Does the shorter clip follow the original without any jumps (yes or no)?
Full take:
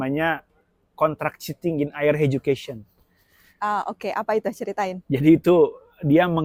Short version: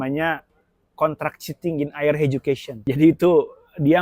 no